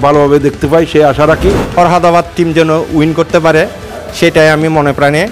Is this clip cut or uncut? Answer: cut